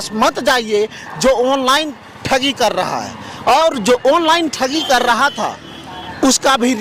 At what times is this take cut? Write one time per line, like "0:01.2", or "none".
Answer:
none